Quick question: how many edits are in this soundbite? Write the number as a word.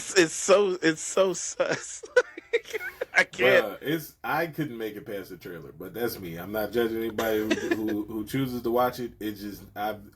zero